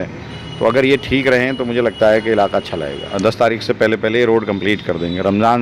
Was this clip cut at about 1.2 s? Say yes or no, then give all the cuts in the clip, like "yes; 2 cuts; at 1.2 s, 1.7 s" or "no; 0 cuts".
no; 1 cut; at 3.1 s